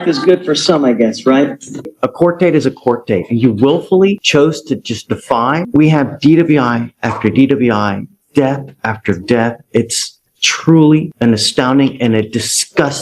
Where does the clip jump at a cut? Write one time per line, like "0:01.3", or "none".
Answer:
0:01.8
0:05.6